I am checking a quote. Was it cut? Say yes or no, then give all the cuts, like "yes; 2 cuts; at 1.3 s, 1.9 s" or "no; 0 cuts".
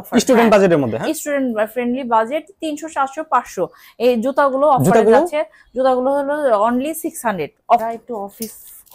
yes; 1 cut; at 7.8 s